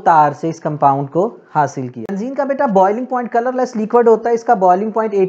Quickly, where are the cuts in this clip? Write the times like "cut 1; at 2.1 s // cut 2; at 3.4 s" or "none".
cut 1; at 2.2 s